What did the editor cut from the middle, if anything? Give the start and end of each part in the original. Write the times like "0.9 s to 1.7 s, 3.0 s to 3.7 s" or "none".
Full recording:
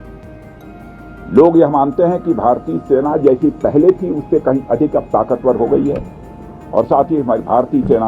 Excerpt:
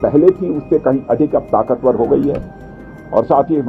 none